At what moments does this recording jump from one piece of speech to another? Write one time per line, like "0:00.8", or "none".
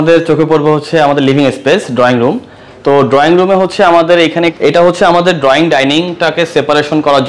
0:04.5